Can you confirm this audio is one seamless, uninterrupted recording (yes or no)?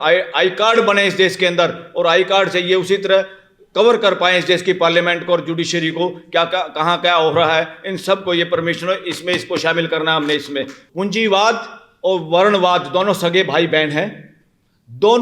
no